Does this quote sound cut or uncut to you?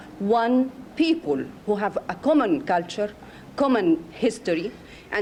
uncut